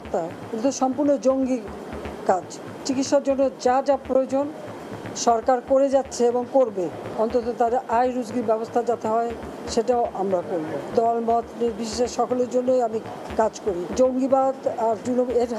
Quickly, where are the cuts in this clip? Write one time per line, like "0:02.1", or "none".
0:02.7
0:07.0
0:10.9
0:13.9